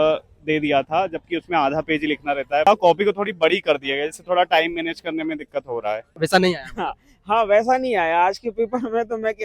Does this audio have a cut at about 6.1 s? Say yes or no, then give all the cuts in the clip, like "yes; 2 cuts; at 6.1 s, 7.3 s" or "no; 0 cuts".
yes; 2 cuts; at 2.7 s, 6.1 s